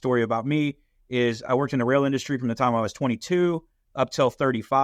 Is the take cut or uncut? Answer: uncut